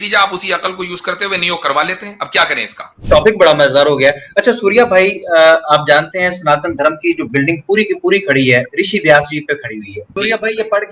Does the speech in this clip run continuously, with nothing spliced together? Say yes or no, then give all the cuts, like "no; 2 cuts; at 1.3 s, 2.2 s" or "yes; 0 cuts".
no; 2 cuts; at 2.9 s, 10.1 s